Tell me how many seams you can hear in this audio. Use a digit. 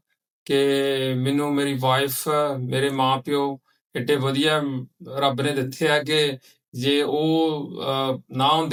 0